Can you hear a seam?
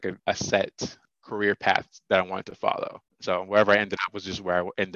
no; 0 cuts

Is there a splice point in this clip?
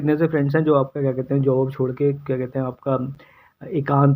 no; 0 cuts

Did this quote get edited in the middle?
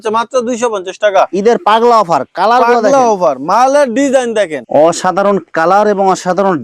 yes; 1 cut; at 4.6 s

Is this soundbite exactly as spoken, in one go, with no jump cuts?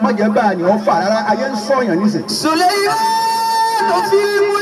yes; 0 cuts

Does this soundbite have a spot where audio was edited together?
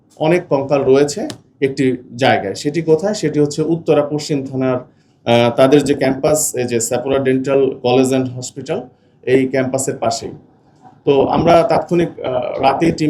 no; 0 cuts

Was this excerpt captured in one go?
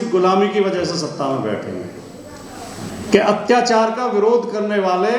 no; 1 cut; at 2.9 s

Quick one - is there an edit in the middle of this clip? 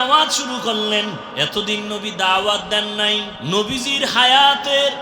yes; 2 cuts; at 1.3 s, 3.3 s

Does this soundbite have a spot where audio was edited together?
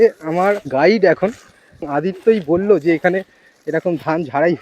yes; 1 cut; at 1.9 s

